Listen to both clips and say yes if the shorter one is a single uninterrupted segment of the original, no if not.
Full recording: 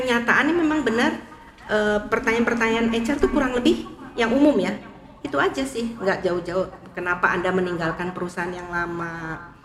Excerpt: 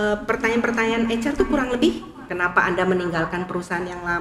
no